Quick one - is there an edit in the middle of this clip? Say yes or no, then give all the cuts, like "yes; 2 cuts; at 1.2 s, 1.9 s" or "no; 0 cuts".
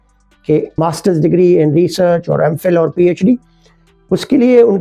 yes; 1 cut; at 1.2 s